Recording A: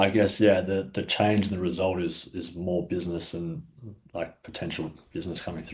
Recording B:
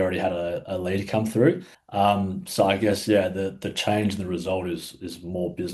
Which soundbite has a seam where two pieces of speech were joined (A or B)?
B